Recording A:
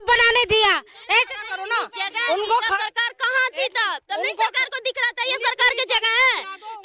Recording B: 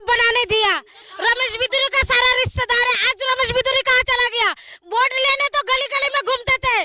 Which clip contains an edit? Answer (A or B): B